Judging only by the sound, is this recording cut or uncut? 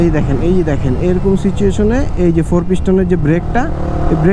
uncut